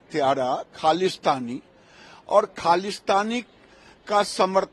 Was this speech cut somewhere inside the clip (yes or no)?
no